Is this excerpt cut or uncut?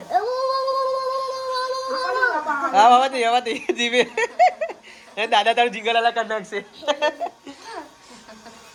uncut